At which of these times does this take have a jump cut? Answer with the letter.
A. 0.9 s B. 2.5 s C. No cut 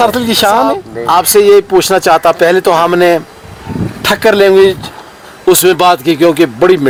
C